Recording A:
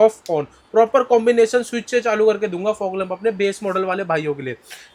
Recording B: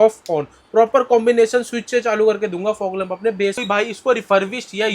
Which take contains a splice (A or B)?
B